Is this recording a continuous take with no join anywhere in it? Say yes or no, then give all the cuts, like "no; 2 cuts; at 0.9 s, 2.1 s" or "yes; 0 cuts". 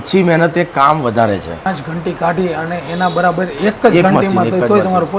no; 1 cut; at 1.6 s